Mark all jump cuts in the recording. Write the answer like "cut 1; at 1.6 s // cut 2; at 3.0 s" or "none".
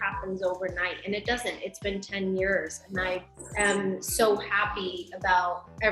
cut 1; at 3.4 s